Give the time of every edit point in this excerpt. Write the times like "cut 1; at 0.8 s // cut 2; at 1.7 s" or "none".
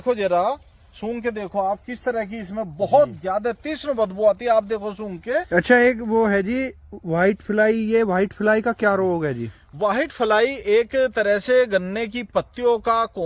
cut 1; at 5.5 s